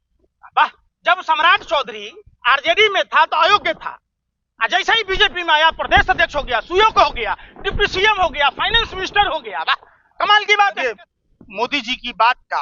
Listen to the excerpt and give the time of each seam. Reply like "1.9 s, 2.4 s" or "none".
10.9 s